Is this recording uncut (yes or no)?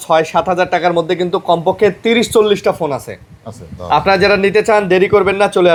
yes